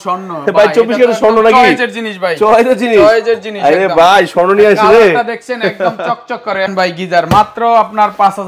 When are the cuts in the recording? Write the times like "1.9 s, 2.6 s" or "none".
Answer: 6.7 s

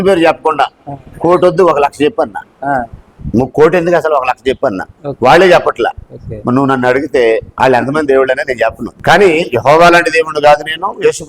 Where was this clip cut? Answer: 8.9 s

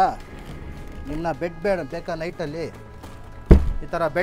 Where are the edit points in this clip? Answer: none

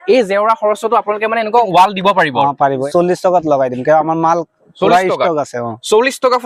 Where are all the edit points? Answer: 1.7 s, 2.8 s

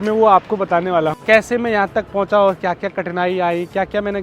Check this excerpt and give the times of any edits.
1.2 s

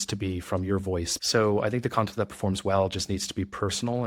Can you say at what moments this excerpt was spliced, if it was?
1.2 s

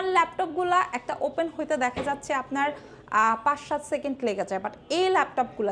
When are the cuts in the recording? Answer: none

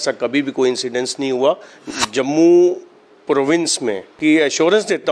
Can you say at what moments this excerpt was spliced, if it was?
1.8 s, 4.1 s

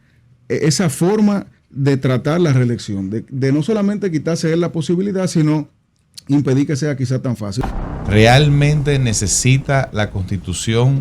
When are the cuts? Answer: 7.6 s

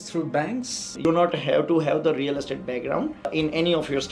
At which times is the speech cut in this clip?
0.9 s

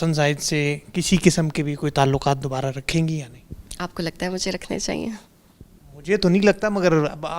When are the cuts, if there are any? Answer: none

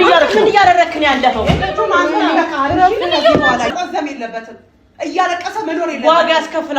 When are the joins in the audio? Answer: 3.7 s

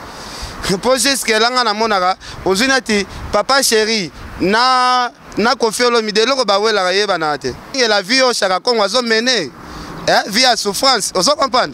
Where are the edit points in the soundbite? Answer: 7.8 s

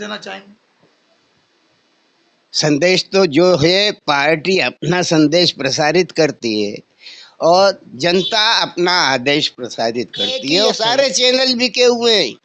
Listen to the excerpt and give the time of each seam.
10.7 s

